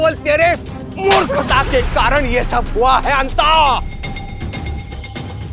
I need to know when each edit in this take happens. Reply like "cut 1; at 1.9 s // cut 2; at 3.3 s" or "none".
none